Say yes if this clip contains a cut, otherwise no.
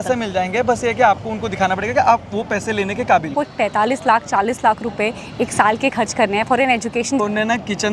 yes